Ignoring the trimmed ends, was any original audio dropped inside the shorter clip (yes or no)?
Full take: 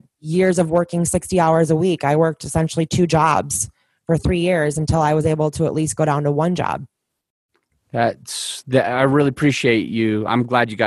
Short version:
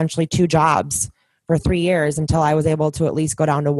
no